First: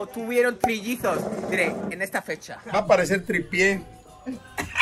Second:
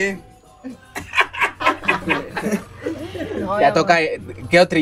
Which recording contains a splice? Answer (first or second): first